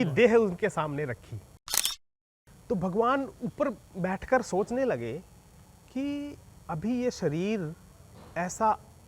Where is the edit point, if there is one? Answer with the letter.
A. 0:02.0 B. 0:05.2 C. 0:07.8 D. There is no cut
A